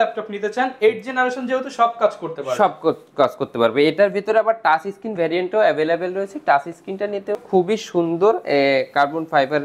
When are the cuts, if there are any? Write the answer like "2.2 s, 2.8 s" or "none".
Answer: 7.4 s